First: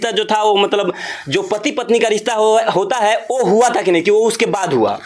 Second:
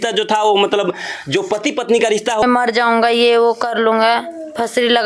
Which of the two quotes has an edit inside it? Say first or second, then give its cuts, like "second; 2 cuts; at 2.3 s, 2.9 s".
second; 1 cut; at 2.4 s